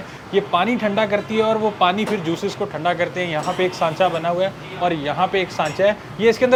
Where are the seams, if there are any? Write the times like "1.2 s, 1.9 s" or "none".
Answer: none

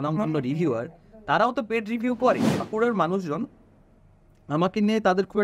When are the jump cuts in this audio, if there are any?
2.7 s

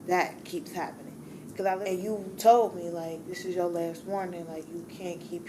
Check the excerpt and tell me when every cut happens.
1.8 s

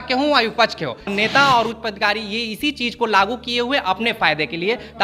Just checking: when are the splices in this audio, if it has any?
1.1 s

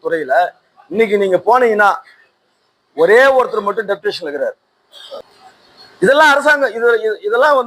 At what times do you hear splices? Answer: 5.3 s

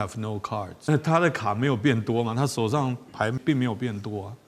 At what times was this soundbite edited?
0.9 s, 3.4 s

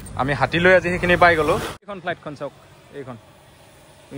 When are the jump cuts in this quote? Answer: 1.9 s

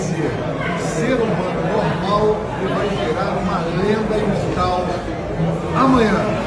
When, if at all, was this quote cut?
none

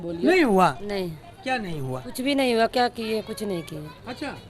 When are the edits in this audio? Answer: none

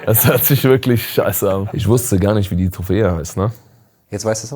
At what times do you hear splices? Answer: 1.8 s

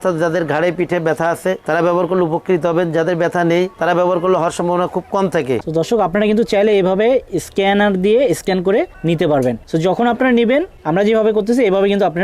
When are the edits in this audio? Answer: 5.6 s, 8.9 s, 9.6 s, 10.8 s

